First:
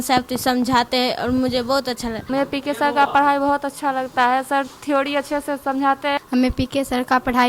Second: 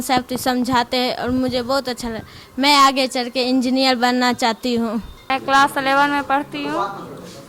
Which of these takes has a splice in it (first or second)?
first